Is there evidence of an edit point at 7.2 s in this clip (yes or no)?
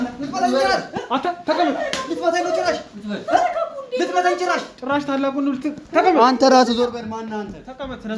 no